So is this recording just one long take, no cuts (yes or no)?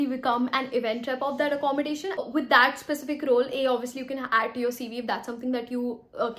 yes